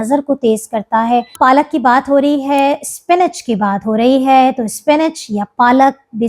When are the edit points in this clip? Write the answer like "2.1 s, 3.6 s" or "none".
1.3 s